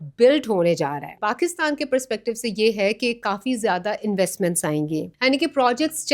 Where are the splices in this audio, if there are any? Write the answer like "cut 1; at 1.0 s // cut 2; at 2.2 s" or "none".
cut 1; at 1.2 s // cut 2; at 5.1 s